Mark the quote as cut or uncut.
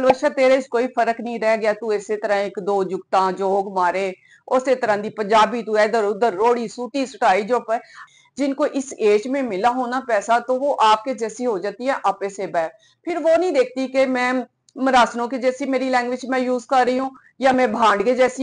cut